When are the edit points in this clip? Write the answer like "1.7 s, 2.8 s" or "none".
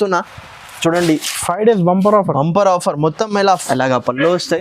3.6 s